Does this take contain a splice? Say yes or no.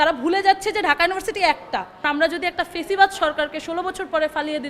yes